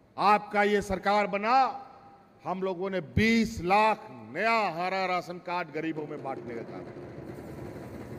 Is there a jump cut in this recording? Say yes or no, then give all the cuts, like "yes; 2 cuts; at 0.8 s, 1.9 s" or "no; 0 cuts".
no; 0 cuts